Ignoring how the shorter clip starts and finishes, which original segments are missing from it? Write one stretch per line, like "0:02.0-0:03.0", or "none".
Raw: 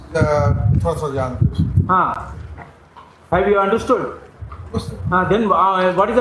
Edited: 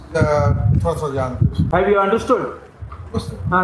0:01.8-0:03.4